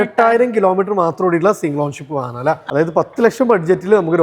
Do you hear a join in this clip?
yes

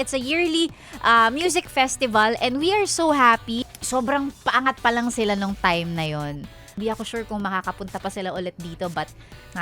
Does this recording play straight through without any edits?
no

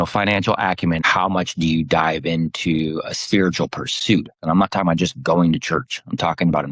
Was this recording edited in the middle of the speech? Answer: yes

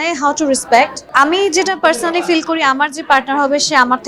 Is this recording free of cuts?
no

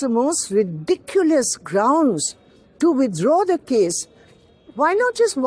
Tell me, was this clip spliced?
no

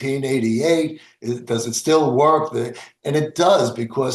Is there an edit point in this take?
no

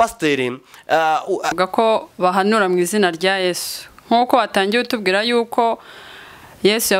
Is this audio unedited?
no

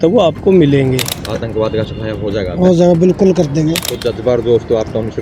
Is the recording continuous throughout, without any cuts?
no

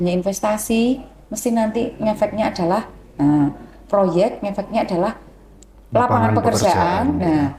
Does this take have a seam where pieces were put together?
no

